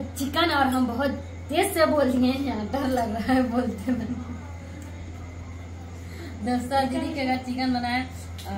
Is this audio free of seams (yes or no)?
yes